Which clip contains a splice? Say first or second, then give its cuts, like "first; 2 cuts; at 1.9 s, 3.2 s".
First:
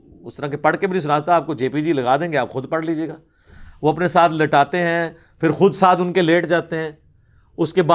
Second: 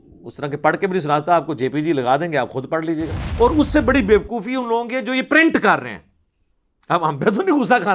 second; 1 cut; at 3.2 s